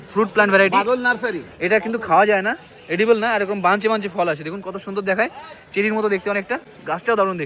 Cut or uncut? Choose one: uncut